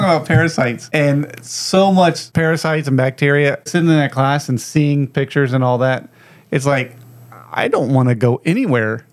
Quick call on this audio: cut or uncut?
cut